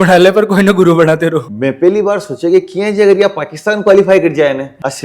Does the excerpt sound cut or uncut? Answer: cut